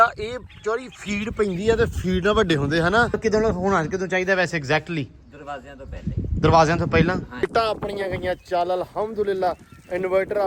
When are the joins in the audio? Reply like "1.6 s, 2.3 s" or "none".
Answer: 3.2 s, 7.4 s